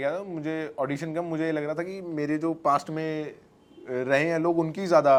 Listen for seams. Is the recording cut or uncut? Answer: uncut